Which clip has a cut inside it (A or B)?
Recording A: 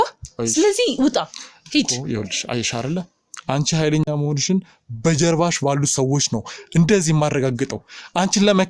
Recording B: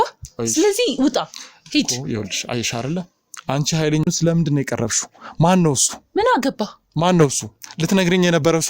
B